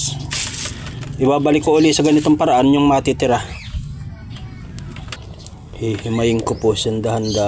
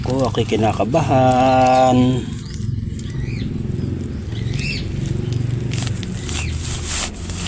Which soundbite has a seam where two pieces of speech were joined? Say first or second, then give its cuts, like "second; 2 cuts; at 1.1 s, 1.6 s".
first; 1 cut; at 5.2 s